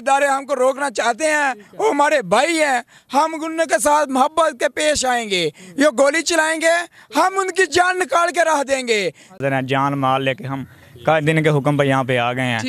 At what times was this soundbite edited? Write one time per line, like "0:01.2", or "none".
0:09.4